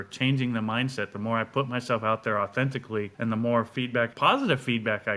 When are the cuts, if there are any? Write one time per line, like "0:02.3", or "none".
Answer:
0:03.1
0:04.1